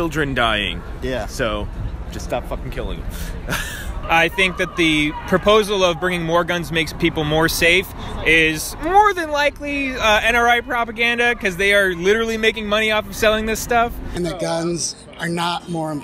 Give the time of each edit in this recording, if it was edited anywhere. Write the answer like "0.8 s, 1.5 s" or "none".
3.9 s, 14.0 s